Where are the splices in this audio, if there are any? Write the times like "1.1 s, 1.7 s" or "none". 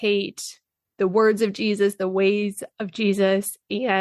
none